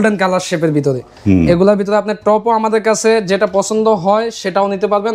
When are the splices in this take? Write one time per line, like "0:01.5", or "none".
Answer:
none